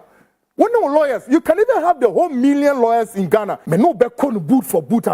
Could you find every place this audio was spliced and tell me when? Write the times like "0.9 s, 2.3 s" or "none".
3.6 s

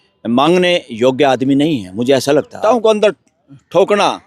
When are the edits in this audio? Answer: 2.6 s

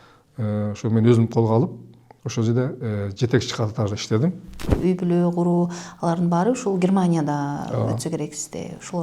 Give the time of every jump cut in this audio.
4.6 s

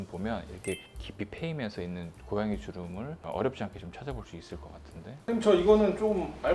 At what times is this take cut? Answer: none

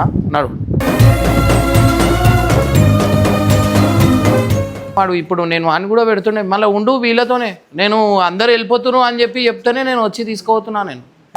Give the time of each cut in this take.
4.9 s

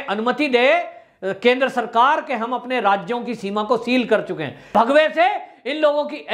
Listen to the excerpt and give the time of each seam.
4.7 s

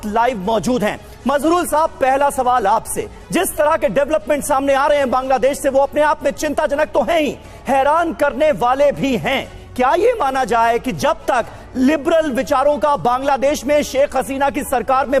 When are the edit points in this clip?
none

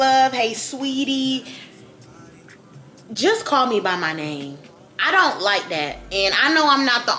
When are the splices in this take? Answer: none

